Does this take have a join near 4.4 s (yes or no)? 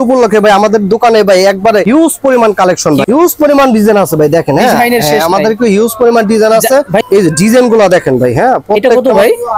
no